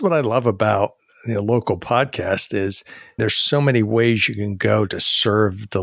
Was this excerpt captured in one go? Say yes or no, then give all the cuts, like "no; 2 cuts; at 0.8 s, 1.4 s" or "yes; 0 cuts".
yes; 0 cuts